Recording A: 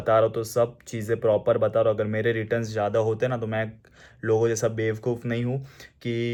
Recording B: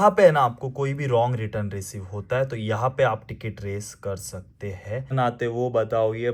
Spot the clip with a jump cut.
B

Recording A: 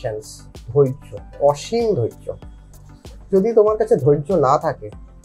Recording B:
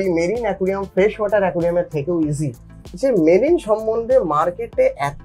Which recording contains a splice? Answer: B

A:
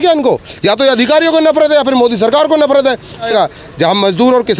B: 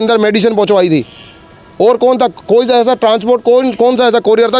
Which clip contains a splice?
A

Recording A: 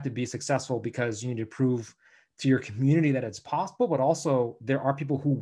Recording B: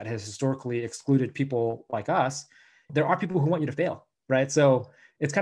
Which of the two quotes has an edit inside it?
B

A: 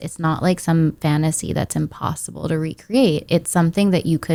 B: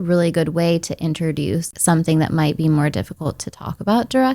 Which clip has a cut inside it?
B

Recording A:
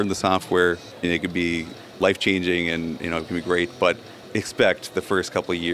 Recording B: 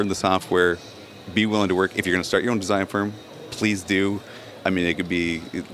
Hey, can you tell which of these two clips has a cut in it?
A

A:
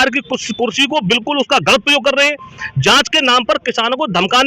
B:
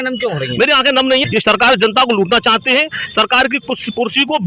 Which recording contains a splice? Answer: B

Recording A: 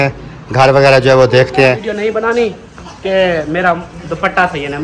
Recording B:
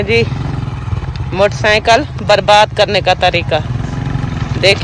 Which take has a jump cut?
A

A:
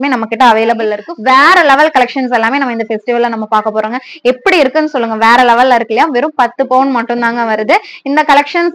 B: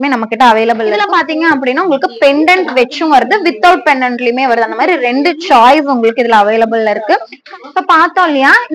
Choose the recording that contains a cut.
B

